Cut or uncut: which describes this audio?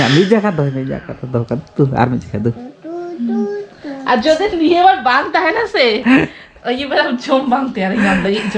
uncut